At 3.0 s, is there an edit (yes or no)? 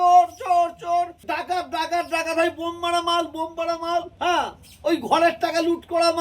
no